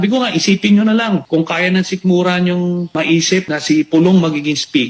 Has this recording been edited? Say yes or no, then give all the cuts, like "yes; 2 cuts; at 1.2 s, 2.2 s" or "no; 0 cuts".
yes; 2 cuts; at 1.2 s, 3.3 s